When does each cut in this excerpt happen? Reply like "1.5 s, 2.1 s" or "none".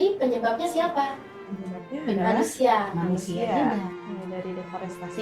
4.0 s